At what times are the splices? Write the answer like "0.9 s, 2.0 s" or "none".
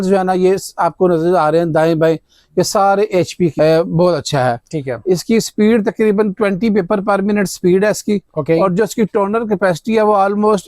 3.5 s